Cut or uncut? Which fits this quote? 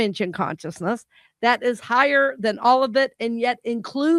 uncut